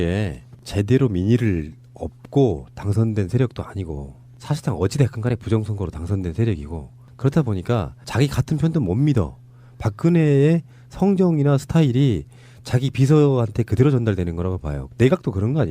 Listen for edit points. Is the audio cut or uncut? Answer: cut